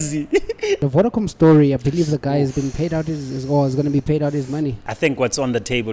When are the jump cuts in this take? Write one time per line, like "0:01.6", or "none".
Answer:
0:00.8
0:04.8